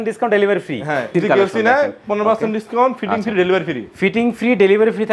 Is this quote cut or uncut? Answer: cut